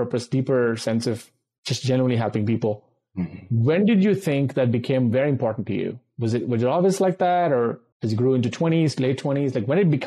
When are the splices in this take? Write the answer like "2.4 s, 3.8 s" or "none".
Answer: none